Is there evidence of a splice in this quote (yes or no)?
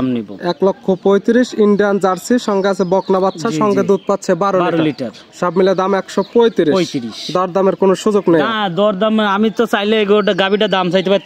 no